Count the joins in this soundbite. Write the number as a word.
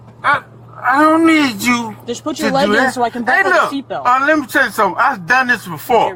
zero